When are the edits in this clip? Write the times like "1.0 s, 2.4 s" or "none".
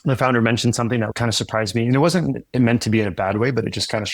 1.1 s